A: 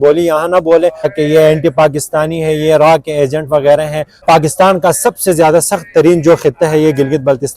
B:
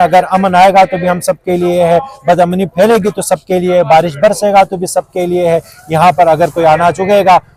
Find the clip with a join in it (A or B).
A